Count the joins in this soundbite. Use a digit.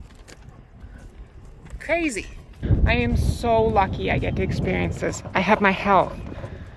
1